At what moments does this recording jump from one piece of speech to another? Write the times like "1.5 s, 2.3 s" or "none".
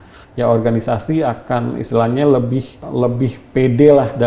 2.8 s